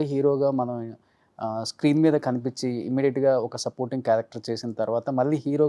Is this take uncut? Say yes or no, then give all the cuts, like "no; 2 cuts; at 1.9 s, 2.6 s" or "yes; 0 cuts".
yes; 0 cuts